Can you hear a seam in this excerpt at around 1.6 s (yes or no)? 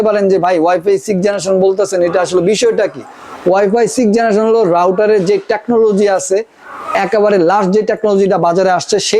no